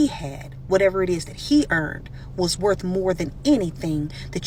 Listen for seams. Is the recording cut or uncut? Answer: uncut